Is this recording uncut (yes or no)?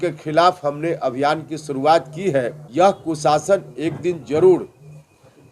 no